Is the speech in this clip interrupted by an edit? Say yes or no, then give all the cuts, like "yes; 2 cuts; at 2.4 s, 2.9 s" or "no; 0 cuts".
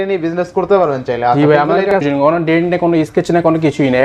yes; 1 cut; at 2.0 s